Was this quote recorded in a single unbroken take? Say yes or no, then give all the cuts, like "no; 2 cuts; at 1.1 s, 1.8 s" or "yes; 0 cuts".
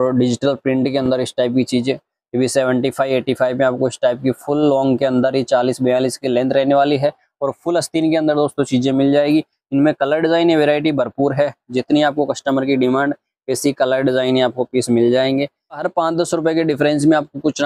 no; 1 cut; at 15.9 s